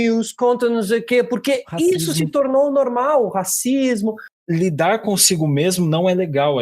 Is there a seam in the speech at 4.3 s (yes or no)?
yes